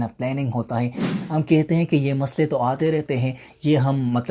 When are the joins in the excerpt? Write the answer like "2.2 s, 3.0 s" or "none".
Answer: 1.1 s